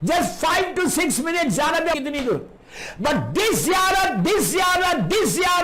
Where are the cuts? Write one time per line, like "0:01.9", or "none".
0:01.9